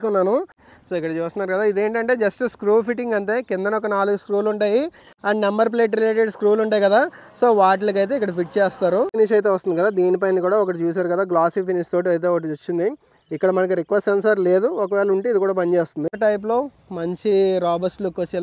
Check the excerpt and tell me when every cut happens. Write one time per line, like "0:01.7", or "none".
0:09.1
0:16.1